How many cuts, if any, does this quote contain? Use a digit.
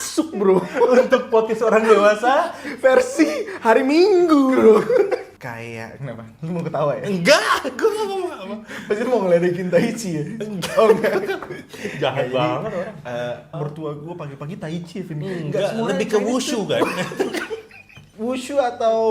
3